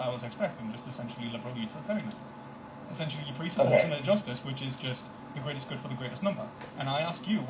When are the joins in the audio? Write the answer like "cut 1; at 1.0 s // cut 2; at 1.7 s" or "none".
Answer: none